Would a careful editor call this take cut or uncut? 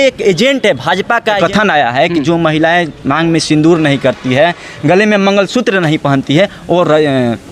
cut